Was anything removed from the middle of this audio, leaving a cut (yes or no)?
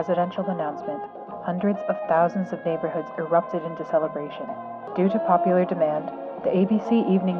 no